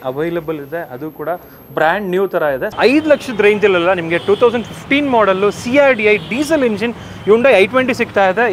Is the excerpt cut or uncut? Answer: cut